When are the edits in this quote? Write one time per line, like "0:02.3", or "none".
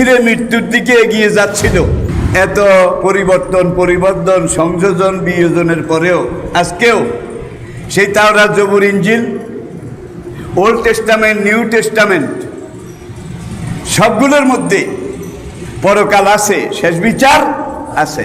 0:02.1

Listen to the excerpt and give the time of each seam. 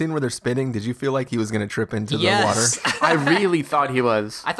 none

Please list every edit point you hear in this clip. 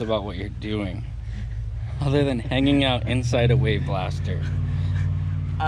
none

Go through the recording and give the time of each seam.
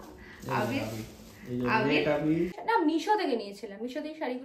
0:02.6

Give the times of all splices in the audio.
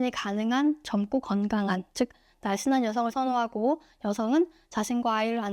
none

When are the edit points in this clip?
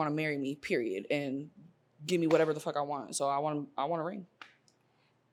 none

